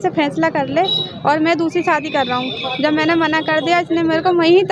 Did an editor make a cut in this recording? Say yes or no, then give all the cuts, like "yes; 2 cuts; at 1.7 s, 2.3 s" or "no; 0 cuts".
no; 0 cuts